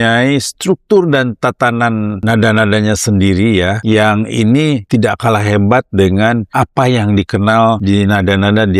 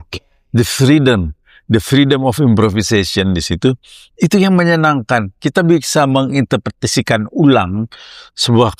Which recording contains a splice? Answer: first; 5 cuts; at 2.2 s, 3.8 s, 4.8 s, 6.5 s, 7.8 s

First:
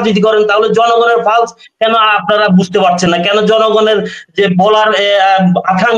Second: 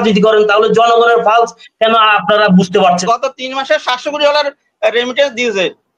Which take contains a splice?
second; 1 cut; at 3.0 s

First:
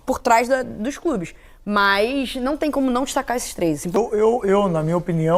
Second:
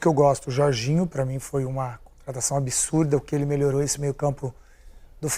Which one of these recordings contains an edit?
first; 1 cut; at 4.0 s

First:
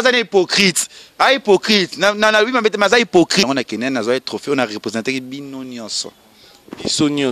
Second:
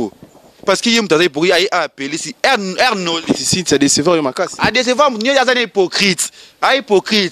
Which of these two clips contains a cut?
first; 1 cut; at 3.4 s

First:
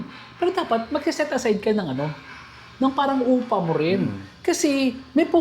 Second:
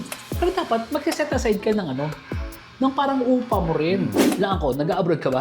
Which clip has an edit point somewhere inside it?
second; 1 cut; at 4.2 s

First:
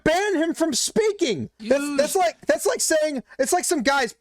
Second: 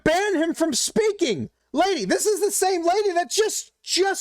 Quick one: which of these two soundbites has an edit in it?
first; 1 cut; at 1.5 s

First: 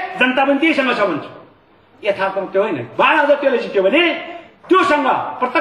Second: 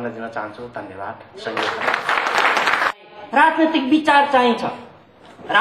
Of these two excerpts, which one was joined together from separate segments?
second; 1 cut; at 2.9 s

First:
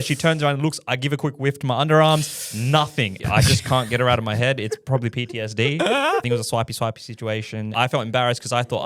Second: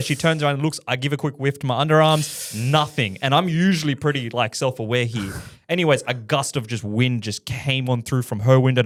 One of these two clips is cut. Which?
first; 3 cuts; at 3.1 s, 6.2 s, 7.7 s

